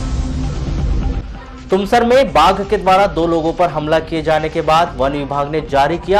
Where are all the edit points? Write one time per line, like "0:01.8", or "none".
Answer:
0:01.1